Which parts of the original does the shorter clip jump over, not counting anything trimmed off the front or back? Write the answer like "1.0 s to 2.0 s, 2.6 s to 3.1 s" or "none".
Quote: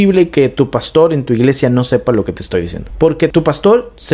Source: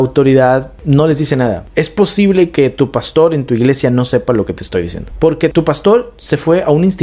none